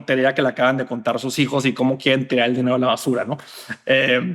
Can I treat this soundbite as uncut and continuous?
yes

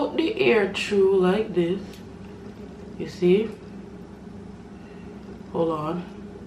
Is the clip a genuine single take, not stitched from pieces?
yes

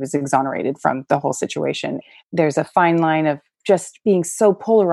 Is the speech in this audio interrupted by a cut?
yes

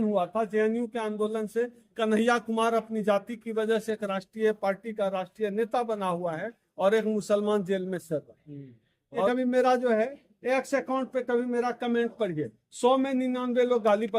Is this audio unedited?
no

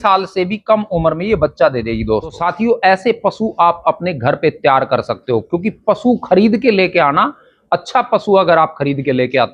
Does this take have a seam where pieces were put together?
yes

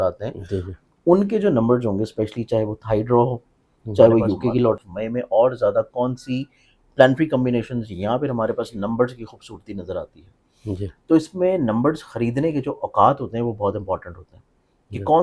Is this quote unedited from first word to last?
no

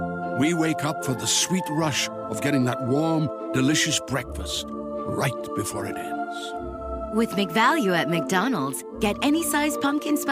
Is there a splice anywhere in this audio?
no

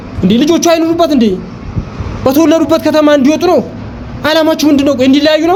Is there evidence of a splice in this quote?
no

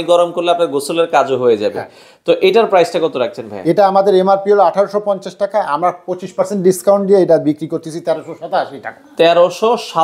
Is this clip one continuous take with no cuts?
yes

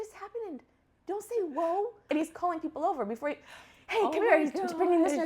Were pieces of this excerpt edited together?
yes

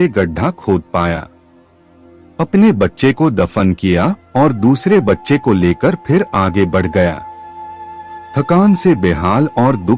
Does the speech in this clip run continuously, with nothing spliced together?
yes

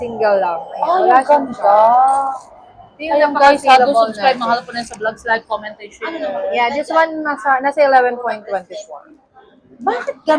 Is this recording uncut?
yes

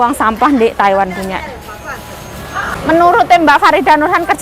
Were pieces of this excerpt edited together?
yes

